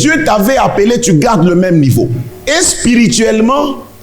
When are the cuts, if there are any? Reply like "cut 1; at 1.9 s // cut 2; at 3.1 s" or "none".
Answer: cut 1; at 2.3 s